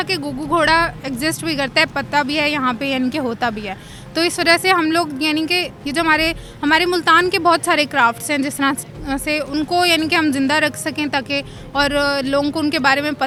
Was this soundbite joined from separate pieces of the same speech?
no; 0 cuts

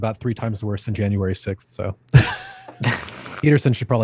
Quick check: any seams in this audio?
no; 0 cuts

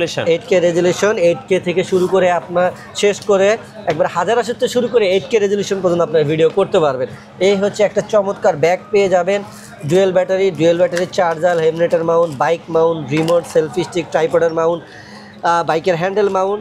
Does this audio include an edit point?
no; 0 cuts

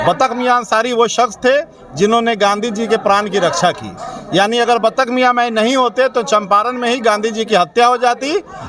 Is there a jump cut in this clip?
no; 0 cuts

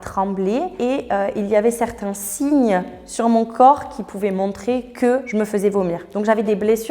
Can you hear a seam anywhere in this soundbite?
no; 0 cuts

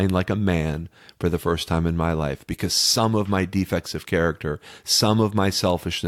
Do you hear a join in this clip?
no; 0 cuts

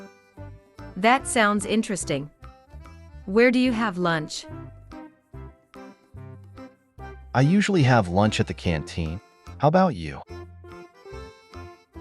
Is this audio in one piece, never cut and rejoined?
no; 5 cuts; at 0.9 s, 4.4 s, 5.9 s, 7.3 s, 10.3 s

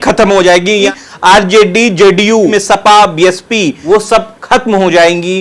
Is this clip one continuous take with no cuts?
no; 3 cuts; at 0.9 s, 2.5 s, 3.8 s

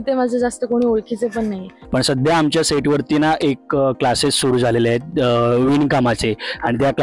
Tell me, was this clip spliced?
yes; 1 cut; at 1.7 s

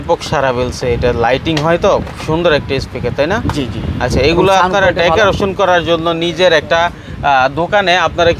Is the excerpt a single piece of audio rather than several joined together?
yes; 0 cuts

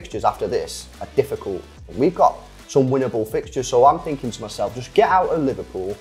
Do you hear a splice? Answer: no; 0 cuts

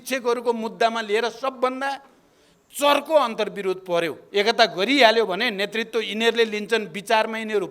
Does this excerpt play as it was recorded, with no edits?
no; 1 cut; at 4.2 s

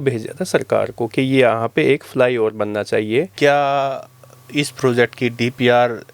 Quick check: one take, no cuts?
no; 1 cut; at 3.3 s

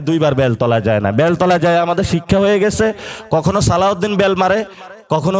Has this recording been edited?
no; 0 cuts

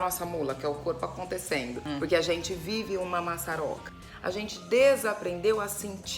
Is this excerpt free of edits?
no; 1 cut; at 3.8 s

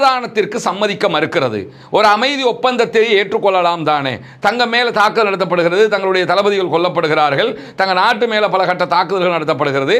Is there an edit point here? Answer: no; 0 cuts

